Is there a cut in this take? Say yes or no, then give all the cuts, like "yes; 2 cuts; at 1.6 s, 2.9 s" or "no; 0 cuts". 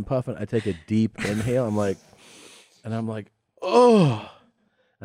no; 0 cuts